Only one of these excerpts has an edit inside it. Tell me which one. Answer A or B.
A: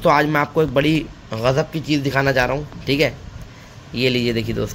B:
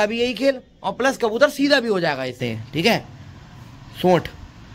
B